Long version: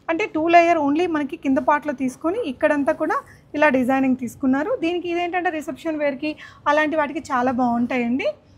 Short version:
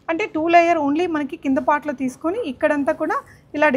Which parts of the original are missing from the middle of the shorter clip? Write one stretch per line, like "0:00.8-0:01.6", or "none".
none

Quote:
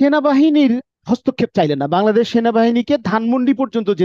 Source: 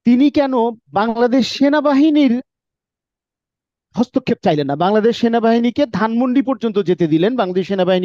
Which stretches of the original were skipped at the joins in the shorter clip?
0:02.5-0:03.8

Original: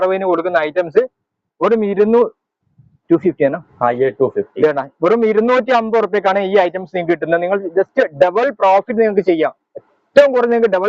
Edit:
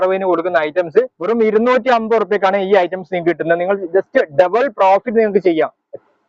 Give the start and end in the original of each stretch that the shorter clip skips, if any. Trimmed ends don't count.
0:01.2-0:05.0

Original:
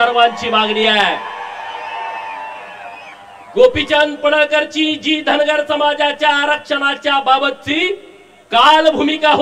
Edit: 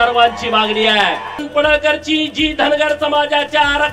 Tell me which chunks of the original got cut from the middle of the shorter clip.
0:01.5-0:04.1

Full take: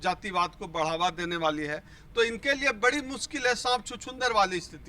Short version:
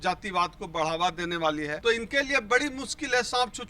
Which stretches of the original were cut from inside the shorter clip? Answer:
0:01.7-0:02.1

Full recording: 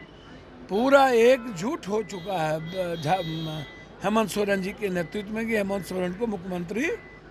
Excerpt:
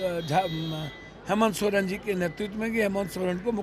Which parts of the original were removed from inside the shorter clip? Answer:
none

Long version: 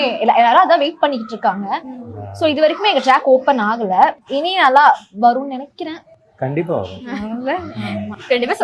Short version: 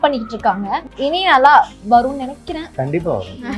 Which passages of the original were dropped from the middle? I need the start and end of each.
0:01.9-0:04.2
0:06.0-0:06.3

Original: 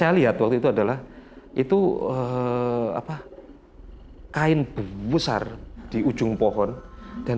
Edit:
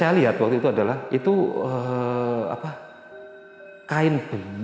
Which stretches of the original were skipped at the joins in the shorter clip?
0:01.0-0:01.5

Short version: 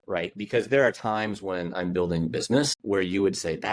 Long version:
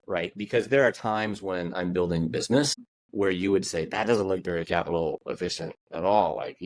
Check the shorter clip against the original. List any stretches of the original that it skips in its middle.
0:02.8-0:03.1

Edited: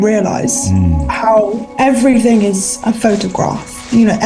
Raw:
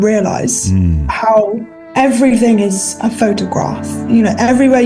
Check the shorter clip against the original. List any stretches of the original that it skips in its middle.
0:01.6-0:01.8

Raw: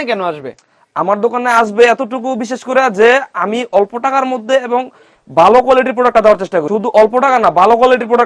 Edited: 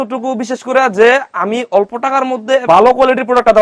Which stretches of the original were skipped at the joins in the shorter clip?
0:04.6-0:05.3

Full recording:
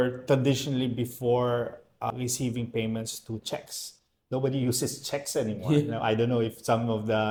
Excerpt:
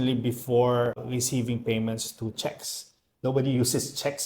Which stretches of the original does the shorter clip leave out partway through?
0:01.7-0:02.1

